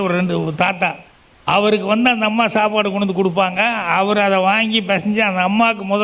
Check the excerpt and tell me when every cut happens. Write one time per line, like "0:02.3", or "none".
none